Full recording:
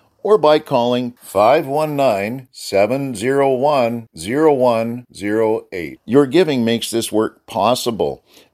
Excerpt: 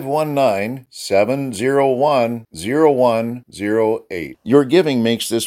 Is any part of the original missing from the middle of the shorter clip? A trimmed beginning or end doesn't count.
no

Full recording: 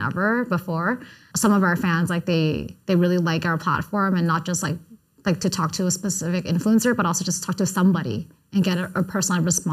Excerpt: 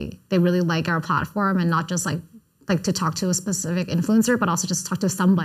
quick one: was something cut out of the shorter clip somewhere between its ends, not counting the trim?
no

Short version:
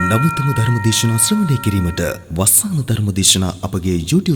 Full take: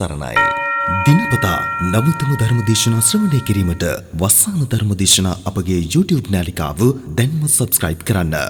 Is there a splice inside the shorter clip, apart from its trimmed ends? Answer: no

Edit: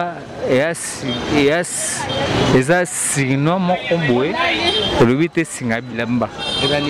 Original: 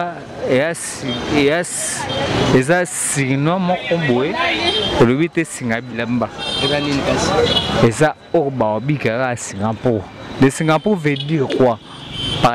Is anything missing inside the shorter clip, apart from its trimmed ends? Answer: no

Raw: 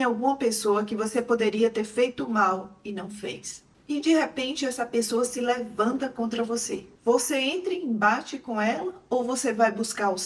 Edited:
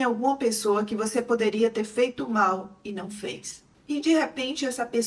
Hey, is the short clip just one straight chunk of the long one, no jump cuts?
yes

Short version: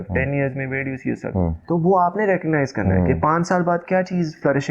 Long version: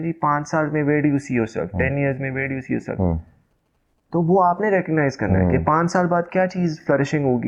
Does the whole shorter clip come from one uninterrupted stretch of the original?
no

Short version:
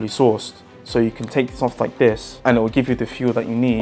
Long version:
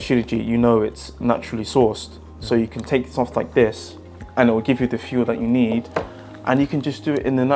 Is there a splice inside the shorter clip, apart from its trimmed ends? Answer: yes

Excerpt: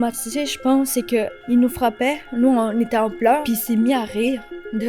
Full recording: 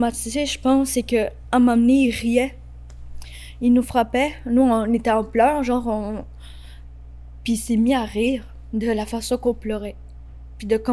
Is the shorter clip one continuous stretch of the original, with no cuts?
no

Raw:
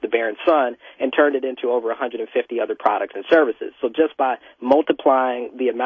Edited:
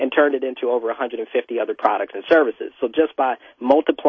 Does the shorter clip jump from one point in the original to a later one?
no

